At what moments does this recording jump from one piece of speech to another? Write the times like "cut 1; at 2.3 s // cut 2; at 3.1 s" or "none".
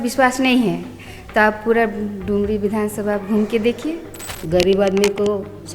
cut 1; at 4.3 s